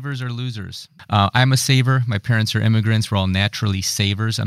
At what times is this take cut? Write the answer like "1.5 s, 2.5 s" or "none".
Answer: 0.9 s

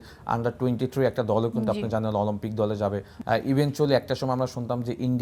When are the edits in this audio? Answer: 3.1 s

